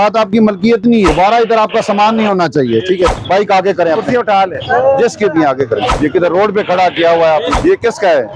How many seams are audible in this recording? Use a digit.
4